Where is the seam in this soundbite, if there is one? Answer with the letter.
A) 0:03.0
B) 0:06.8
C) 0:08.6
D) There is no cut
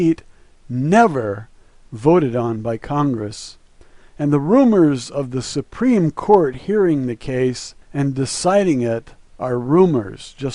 B